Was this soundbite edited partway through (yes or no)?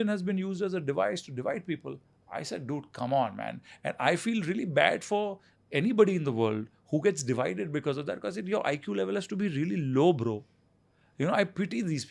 no